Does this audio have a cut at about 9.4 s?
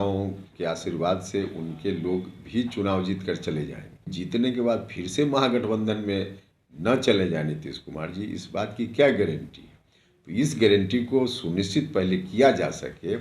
no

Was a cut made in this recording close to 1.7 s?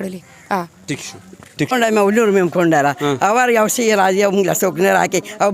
yes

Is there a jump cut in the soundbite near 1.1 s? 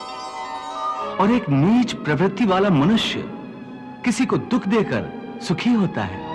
yes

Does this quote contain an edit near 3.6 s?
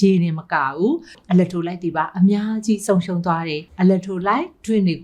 yes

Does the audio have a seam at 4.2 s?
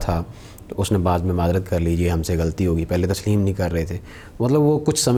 no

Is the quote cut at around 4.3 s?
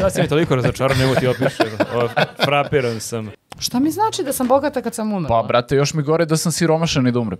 no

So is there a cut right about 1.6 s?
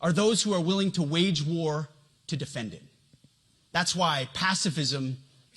no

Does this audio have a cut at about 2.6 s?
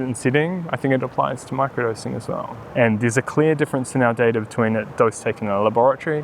yes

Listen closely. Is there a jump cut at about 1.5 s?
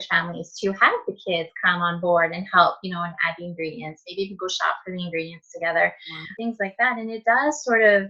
no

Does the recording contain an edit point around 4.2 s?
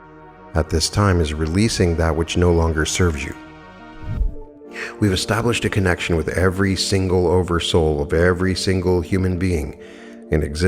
yes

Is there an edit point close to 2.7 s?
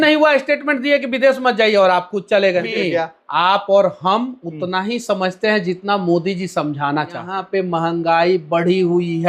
yes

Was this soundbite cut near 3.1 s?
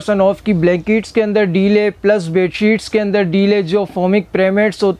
no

